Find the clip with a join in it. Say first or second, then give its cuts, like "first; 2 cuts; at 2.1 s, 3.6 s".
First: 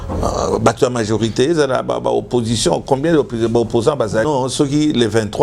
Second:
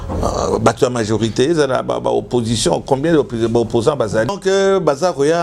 first; 1 cut; at 4.2 s